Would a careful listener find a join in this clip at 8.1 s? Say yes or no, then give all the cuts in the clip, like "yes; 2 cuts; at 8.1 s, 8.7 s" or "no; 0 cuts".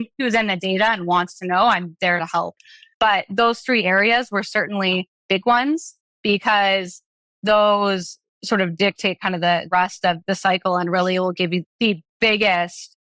no; 1 cut; at 11.6 s